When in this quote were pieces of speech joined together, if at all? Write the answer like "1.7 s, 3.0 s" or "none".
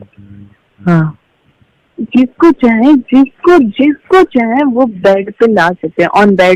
none

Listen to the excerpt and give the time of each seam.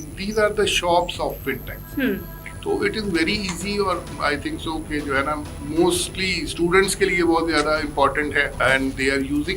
2.5 s, 8.5 s

